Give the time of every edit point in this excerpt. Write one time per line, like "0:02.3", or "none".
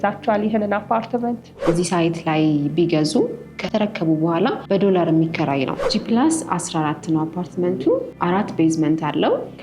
0:01.5
0:04.6
0:05.9
0:08.1